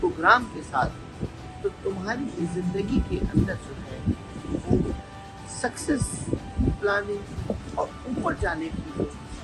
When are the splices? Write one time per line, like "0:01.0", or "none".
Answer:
none